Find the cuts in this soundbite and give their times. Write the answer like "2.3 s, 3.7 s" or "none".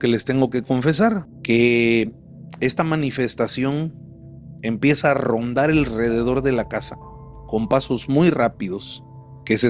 1.3 s